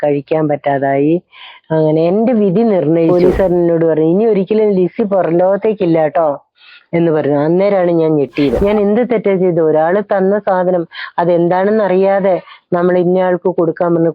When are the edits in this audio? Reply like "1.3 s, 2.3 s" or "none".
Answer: 3.1 s, 8.6 s